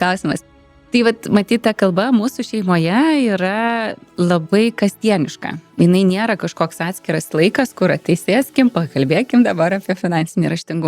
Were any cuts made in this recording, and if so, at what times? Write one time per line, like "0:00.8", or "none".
none